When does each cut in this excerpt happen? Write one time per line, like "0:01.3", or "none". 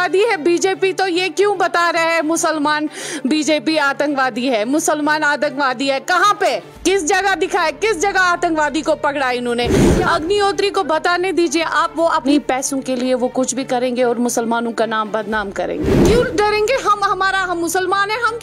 0:06.7
0:09.7
0:12.2
0:15.9